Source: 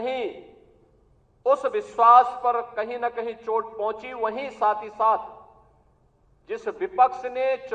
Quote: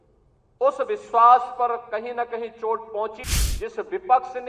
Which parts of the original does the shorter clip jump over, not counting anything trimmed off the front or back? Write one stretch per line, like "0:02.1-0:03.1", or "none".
0:04.1-0:06.1